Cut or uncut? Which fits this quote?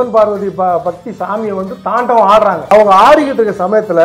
uncut